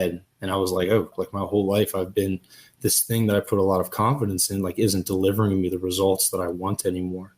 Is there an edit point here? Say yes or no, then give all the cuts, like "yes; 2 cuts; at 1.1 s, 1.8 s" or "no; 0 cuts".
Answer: yes; 1 cut; at 1.2 s